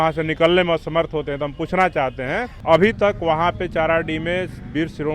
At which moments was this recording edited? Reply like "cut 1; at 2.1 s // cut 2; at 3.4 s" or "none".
cut 1; at 2.5 s

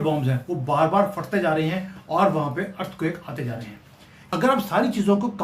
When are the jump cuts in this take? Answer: cut 1; at 4.2 s

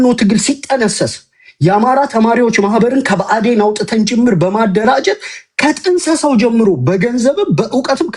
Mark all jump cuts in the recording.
none

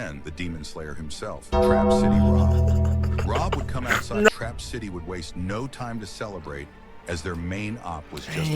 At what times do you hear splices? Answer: cut 1; at 4.3 s

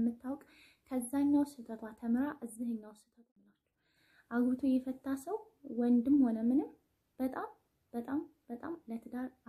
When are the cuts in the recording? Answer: cut 1; at 3.3 s

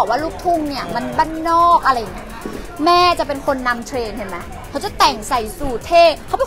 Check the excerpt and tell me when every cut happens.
none

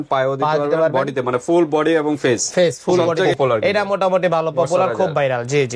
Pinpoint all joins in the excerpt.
cut 1; at 3.3 s

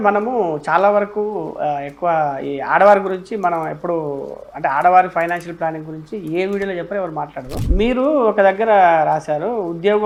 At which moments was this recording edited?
none

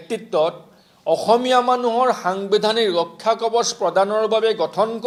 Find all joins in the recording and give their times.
none

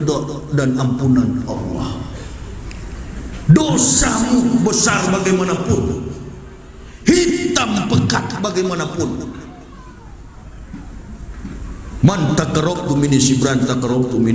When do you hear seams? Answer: none

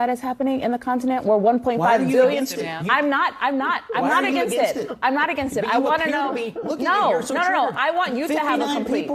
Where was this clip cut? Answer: none

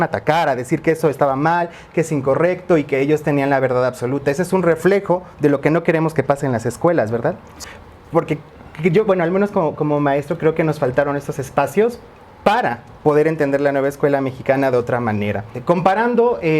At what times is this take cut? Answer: cut 1; at 7.6 s // cut 2; at 15.5 s

